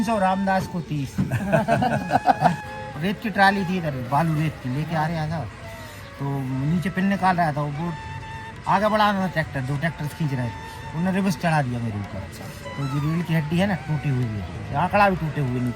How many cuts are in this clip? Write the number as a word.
one